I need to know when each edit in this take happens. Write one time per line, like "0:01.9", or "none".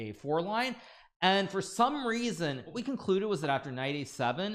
0:02.8